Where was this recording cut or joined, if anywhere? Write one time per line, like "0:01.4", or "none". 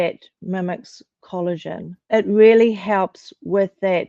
0:02.0